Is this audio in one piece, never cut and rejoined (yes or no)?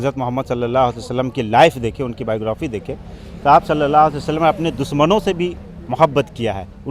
yes